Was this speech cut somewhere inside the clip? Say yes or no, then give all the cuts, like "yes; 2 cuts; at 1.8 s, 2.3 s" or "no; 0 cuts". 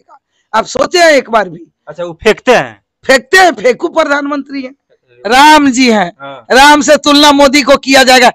yes; 1 cut; at 5.2 s